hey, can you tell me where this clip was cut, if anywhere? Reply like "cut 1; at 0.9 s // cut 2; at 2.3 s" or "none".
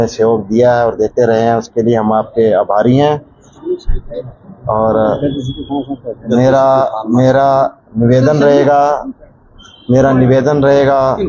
none